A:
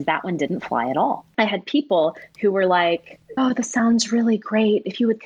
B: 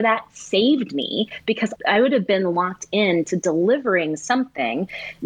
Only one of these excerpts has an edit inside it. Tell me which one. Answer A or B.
A